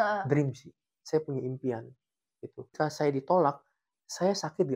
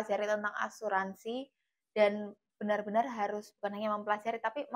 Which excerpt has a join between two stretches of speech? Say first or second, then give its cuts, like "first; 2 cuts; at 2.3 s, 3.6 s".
first; 2 cuts; at 0.9 s, 2.7 s